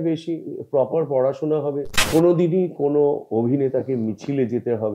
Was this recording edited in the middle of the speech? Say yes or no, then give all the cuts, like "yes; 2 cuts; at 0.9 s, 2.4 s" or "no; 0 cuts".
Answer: yes; 1 cut; at 1.9 s